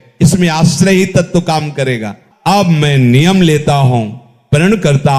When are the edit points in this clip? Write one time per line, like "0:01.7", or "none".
0:02.2